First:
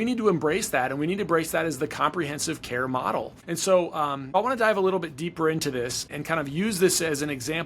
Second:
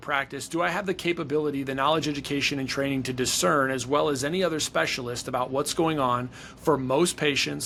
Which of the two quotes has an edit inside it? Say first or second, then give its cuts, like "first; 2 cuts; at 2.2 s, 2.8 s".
first; 3 cuts; at 3.4 s, 4.3 s, 6.1 s